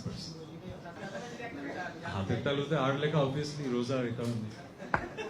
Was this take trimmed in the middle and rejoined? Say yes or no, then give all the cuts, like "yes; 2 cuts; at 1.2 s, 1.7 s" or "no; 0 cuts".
no; 0 cuts